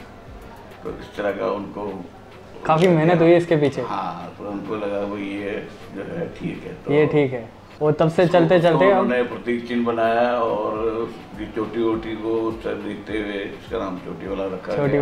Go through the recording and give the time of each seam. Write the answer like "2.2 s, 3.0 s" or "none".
none